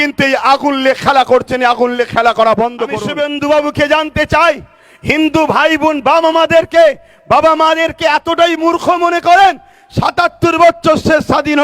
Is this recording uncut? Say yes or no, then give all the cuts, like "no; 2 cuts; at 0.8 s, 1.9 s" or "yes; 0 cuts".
no; 1 cut; at 3.0 s